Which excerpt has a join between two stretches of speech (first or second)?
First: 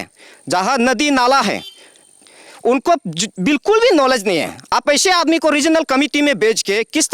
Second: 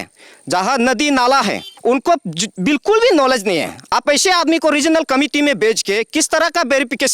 second